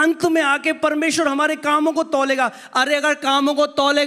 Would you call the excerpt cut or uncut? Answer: uncut